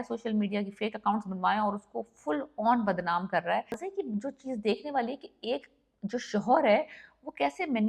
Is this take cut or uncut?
cut